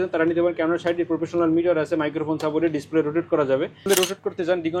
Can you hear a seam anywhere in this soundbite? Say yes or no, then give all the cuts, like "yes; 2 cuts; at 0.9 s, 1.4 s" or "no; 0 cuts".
yes; 1 cut; at 3.8 s